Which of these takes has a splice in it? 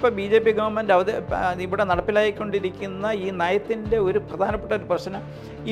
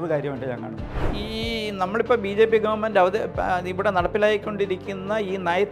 second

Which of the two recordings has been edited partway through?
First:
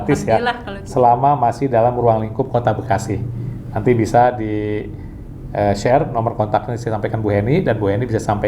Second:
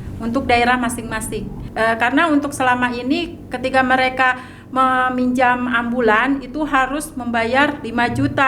second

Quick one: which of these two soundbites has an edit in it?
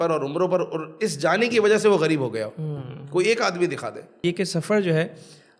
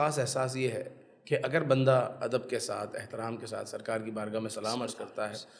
first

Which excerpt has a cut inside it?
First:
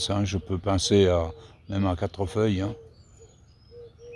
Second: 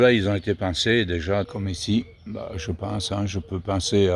second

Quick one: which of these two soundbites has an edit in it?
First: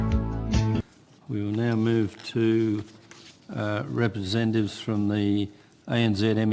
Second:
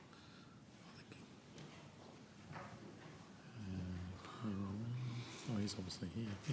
second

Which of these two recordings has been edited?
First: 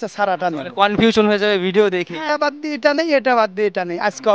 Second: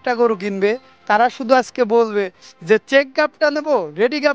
first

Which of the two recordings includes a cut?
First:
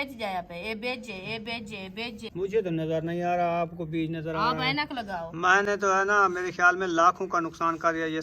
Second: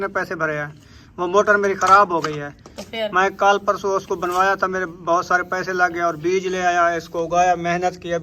first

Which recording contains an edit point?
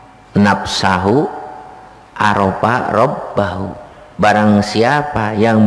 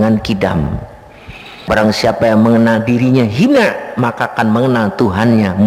second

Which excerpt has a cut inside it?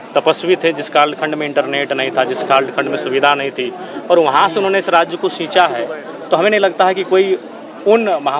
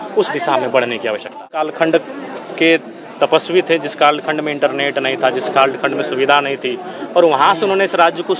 second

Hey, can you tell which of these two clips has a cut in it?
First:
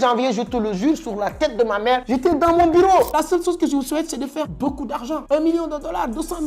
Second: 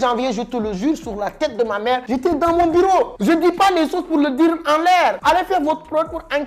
first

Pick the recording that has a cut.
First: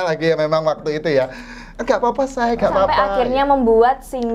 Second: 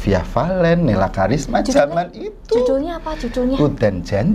first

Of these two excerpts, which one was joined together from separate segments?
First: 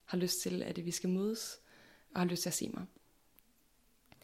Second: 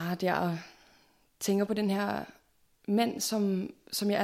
first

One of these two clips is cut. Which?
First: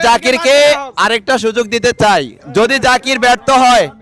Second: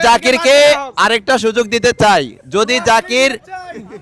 first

